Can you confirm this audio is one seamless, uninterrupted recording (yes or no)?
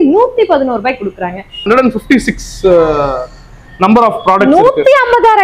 no